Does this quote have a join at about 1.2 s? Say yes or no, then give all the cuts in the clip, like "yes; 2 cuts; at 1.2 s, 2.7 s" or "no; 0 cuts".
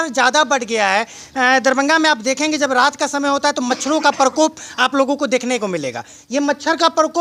no; 0 cuts